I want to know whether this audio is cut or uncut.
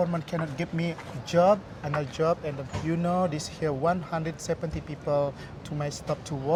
uncut